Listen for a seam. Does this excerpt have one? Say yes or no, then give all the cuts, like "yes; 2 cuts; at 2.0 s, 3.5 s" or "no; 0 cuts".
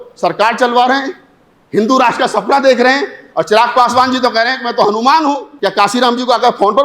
yes; 1 cut; at 5.5 s